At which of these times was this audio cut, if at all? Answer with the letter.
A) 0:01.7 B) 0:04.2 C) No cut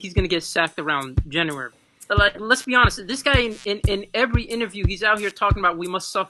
A